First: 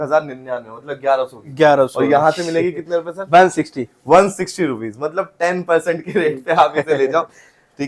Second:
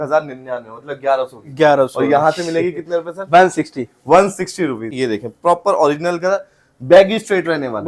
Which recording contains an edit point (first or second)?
second